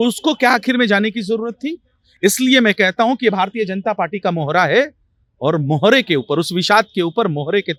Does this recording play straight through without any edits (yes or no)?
yes